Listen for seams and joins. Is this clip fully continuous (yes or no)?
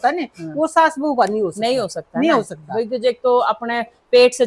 yes